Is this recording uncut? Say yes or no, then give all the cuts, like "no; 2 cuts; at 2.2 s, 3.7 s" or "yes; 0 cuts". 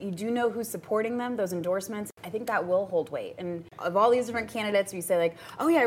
no; 2 cuts; at 2.1 s, 3.7 s